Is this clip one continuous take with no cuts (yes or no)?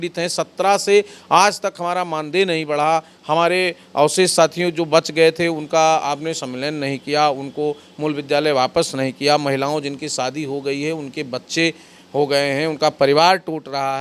yes